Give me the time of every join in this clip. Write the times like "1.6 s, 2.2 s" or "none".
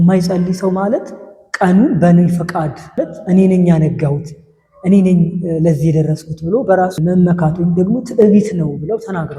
2.8 s, 7.0 s